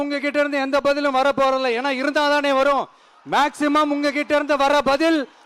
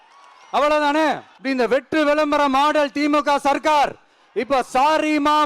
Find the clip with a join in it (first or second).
second